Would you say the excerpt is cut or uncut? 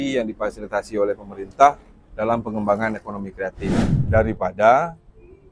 cut